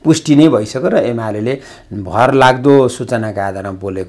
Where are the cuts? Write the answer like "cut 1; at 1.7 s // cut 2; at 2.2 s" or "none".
none